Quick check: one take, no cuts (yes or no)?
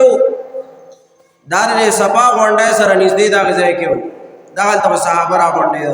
yes